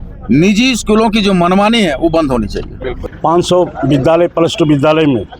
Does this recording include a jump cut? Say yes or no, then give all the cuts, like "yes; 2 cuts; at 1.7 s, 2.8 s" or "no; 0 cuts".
yes; 1 cut; at 3.1 s